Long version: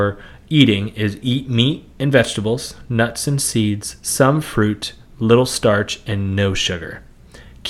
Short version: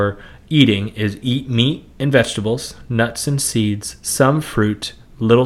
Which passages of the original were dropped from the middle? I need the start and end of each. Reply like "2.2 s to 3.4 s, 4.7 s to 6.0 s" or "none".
none